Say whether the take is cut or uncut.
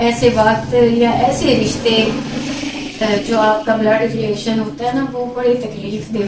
uncut